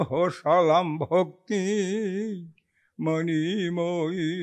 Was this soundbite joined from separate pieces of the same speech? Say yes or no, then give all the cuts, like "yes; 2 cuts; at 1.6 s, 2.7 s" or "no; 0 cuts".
no; 0 cuts